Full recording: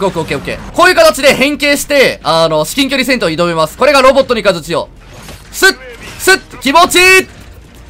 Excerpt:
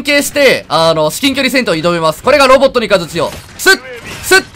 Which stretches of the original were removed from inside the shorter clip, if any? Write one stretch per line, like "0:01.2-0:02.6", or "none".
0:05.0-0:05.4

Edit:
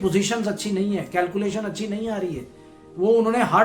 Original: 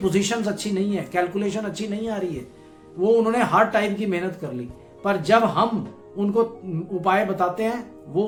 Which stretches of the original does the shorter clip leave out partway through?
none

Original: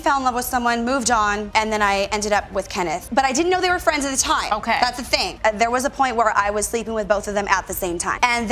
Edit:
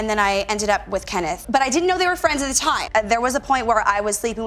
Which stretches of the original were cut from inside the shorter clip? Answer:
0:04.4-0:05.3

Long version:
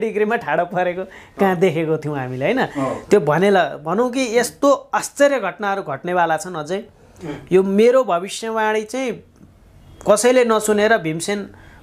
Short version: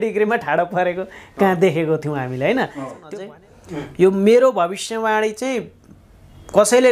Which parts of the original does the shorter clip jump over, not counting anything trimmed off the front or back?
0:03.0-0:06.5

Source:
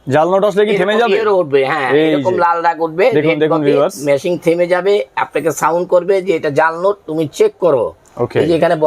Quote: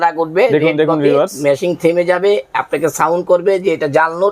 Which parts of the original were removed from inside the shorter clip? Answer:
none

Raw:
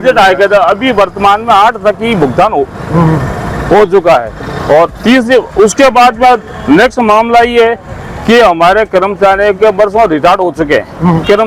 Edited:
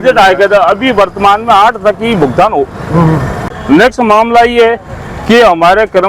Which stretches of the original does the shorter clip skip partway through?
0:03.5-0:06.5

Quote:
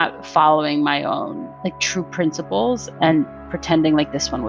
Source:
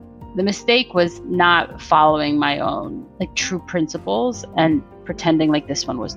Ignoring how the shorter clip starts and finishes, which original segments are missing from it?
none

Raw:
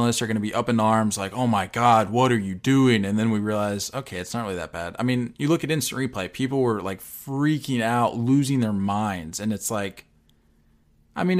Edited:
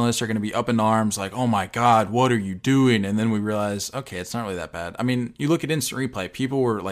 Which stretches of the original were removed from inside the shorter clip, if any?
none

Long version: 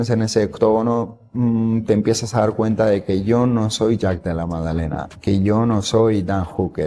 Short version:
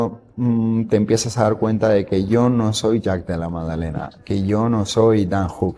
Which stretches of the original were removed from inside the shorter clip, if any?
none

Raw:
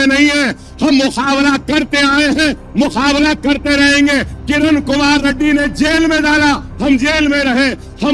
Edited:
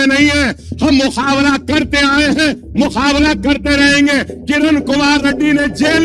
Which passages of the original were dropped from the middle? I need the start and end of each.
none

